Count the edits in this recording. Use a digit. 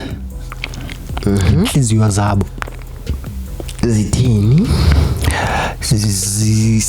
0